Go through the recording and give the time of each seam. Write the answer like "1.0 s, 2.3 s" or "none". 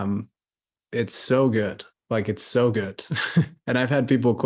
none